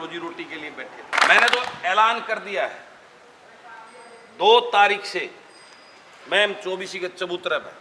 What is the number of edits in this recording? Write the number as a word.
one